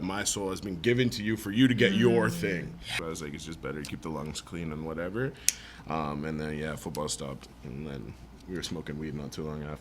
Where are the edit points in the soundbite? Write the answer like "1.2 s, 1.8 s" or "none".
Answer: 3.0 s